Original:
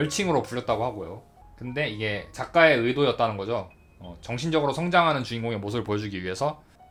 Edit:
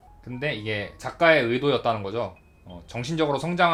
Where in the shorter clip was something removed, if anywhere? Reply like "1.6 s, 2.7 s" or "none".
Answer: none